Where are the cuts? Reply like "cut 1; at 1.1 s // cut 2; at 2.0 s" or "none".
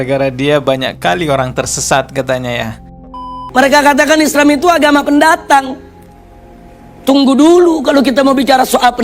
cut 1; at 3.1 s

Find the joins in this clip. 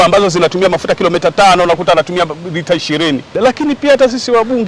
cut 1; at 3.3 s

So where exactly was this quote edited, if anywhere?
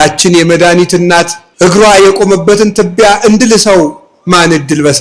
cut 1; at 1.4 s

